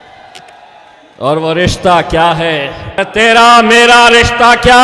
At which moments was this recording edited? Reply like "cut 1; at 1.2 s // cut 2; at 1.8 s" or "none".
cut 1; at 3.0 s